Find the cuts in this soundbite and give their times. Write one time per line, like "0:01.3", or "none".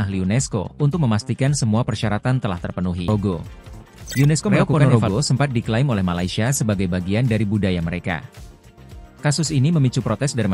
0:04.6

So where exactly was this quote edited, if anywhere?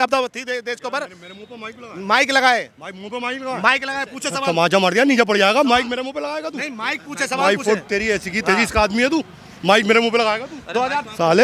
none

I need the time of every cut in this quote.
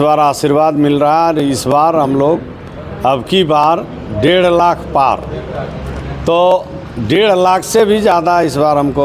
none

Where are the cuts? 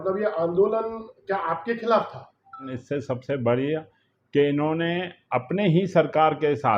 0:02.8

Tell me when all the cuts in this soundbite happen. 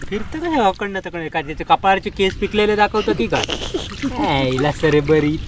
none

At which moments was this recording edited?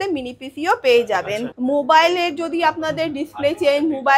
0:01.4

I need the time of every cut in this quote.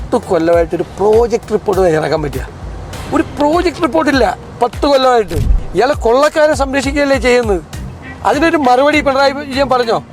0:05.5

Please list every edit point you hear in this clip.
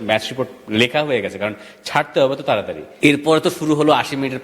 0:02.8

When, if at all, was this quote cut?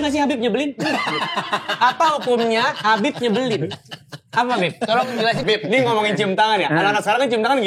0:05.4

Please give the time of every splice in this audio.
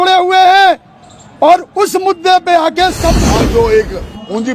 0:03.2

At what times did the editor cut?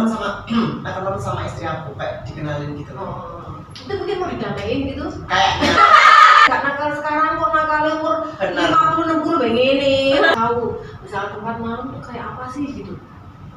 0:06.5
0:10.3

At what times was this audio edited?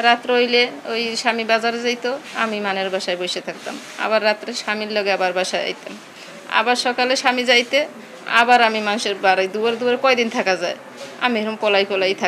none

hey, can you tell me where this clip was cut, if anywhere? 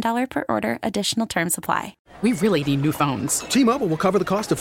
0:02.0

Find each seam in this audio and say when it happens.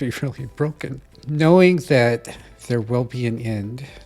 0:01.1

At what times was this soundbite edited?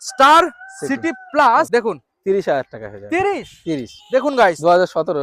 0:01.7

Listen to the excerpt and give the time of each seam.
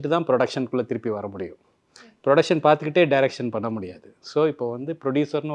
none

